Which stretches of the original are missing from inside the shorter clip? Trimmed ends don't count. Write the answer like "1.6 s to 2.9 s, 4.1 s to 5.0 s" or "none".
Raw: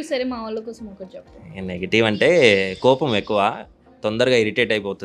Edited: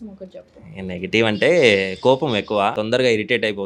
3.5 s to 4.0 s

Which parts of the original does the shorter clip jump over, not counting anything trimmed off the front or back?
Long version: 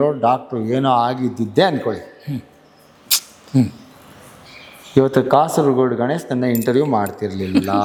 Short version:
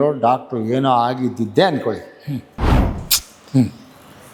none

